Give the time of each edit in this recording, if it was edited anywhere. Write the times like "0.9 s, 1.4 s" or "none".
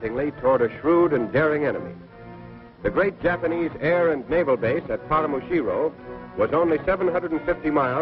none